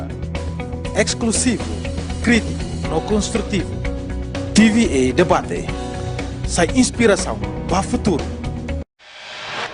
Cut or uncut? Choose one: cut